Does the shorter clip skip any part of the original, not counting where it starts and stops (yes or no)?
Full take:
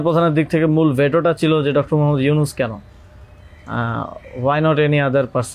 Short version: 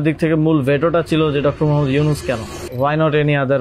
yes